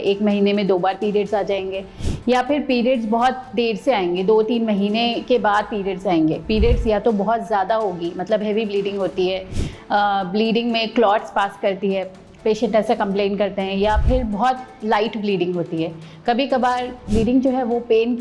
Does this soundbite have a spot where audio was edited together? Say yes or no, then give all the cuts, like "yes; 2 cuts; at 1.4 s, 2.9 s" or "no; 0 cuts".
yes; 1 cut; at 17.0 s